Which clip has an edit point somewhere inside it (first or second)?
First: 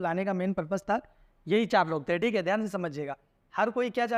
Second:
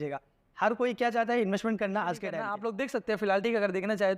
second